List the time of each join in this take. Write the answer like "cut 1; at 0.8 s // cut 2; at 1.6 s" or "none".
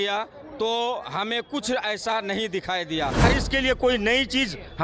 cut 1; at 3.2 s